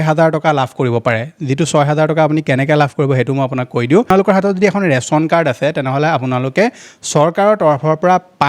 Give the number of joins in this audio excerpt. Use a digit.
1